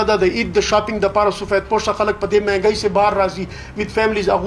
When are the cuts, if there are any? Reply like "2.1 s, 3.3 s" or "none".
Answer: none